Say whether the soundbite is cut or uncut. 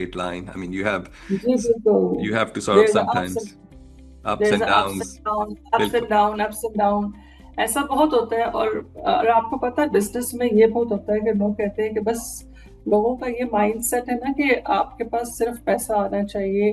uncut